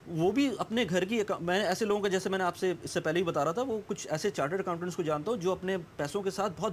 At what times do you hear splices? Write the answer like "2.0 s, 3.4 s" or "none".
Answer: none